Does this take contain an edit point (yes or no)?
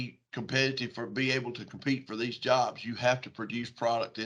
no